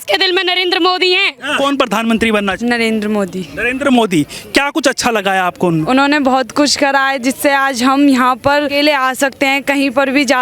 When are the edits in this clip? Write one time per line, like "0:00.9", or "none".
0:01.6
0:02.6
0:05.9
0:08.7